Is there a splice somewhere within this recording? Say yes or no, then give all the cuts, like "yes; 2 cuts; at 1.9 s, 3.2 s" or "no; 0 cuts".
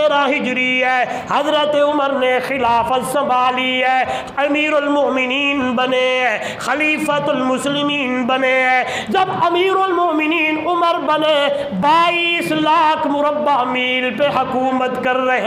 no; 0 cuts